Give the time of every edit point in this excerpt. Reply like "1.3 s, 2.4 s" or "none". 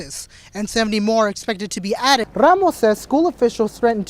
2.3 s